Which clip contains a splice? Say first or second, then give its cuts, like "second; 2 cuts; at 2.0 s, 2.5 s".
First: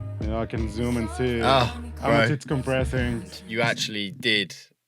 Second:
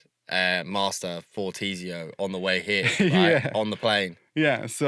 first; 1 cut; at 3.4 s